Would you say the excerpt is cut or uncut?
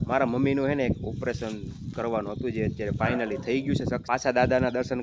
cut